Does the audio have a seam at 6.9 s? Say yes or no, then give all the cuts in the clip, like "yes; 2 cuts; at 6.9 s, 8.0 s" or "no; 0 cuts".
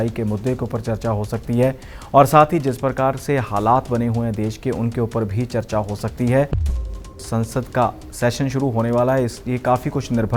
yes; 1 cut; at 6.9 s